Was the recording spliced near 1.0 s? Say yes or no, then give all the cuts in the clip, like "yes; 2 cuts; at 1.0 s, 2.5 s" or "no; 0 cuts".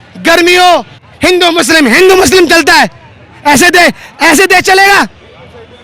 yes; 1 cut; at 1.0 s